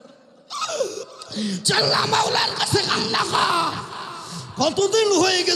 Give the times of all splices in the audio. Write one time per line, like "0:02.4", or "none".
0:01.1